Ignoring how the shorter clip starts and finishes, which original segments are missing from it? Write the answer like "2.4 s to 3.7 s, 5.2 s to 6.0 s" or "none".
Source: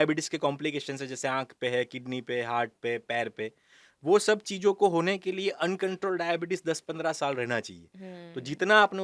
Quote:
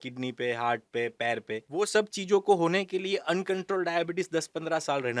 3.6 s to 4.0 s